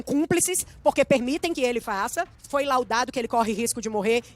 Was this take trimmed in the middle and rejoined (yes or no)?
yes